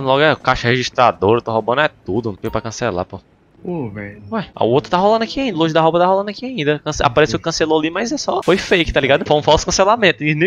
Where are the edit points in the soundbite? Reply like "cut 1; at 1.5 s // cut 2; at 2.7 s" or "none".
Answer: none